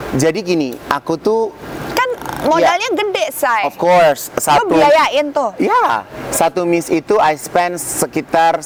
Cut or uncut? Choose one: uncut